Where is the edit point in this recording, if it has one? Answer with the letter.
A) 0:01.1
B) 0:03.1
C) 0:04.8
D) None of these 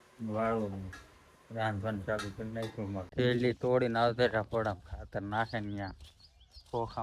B